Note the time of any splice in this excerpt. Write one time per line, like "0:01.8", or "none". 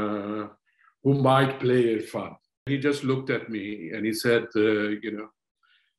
0:02.7